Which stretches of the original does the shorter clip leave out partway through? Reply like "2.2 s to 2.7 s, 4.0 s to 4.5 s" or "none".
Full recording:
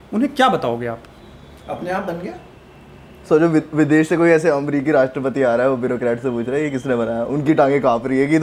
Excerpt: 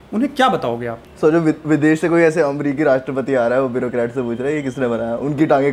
1.0 s to 3.1 s